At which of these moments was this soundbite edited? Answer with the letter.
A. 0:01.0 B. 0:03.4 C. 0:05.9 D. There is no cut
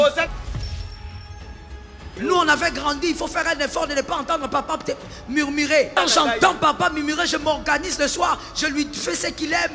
C